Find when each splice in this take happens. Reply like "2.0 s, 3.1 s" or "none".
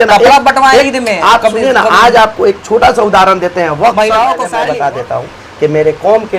4.5 s